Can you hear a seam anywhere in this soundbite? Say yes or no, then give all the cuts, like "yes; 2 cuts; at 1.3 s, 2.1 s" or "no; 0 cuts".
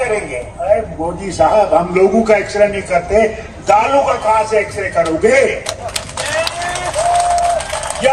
no; 0 cuts